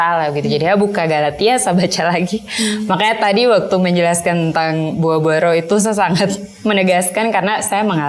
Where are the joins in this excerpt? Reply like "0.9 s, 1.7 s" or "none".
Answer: none

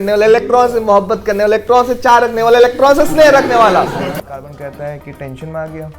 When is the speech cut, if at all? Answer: 4.0 s

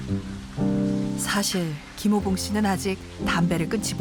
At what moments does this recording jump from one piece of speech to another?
none

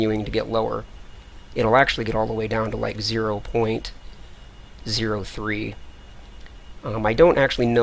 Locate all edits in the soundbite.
none

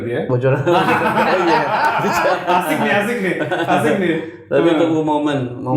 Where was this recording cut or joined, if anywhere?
none

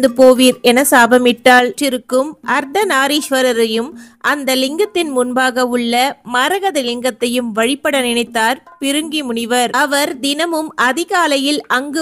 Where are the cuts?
1.8 s

